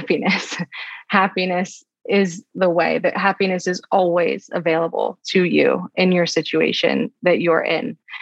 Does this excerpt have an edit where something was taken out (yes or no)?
no